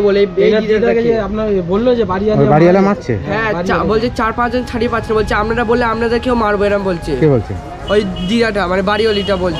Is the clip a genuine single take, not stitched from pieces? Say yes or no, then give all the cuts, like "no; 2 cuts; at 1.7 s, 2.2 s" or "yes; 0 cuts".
yes; 0 cuts